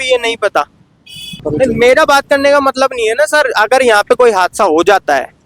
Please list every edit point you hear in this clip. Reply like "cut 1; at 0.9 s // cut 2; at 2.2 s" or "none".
cut 1; at 1.4 s